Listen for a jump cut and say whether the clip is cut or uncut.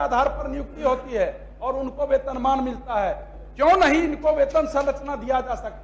uncut